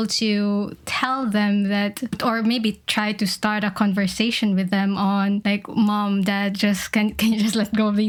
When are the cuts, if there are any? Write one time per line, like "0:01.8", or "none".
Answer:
none